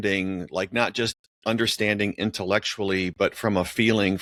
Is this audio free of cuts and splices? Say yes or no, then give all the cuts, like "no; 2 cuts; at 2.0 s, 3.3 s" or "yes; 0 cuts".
yes; 0 cuts